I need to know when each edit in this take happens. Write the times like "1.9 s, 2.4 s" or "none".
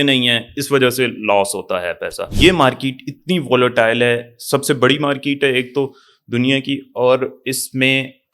2.3 s